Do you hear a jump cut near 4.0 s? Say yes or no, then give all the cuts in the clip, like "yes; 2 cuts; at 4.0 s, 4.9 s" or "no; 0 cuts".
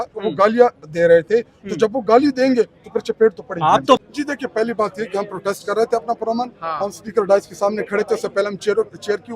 yes; 1 cut; at 4.0 s